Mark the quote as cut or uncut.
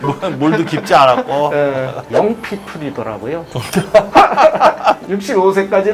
cut